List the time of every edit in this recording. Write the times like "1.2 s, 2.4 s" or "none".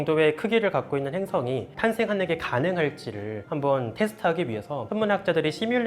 1.7 s, 4.8 s